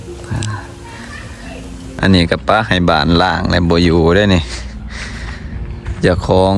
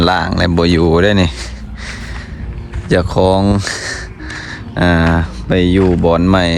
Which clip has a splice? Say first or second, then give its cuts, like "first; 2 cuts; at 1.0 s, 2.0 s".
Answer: first; 1 cut; at 2.0 s